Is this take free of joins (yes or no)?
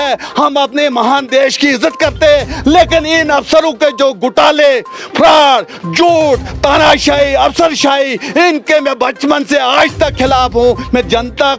yes